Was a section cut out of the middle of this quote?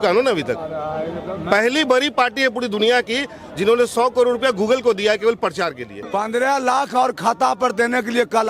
yes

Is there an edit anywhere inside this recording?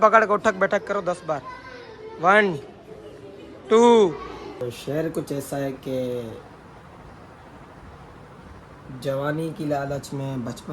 yes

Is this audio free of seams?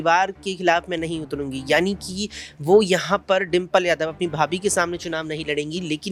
yes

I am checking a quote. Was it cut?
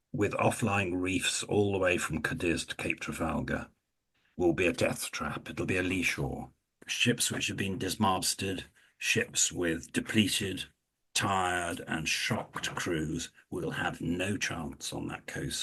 no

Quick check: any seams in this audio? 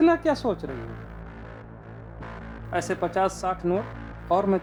no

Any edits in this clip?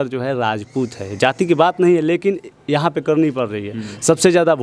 no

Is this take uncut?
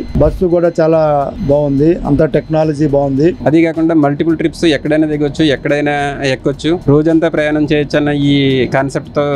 no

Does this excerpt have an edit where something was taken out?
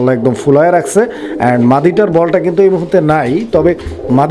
no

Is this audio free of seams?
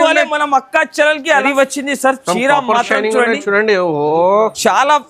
no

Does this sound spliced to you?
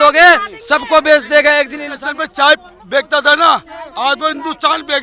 yes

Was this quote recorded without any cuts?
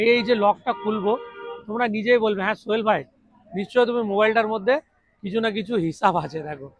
yes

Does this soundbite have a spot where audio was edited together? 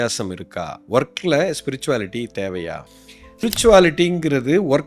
yes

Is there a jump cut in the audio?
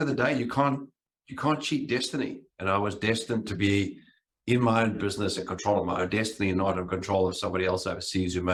no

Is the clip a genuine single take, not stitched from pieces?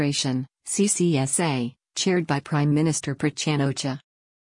yes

